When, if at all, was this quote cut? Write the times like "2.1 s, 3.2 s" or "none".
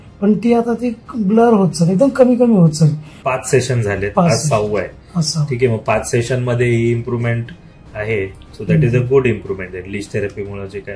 3.2 s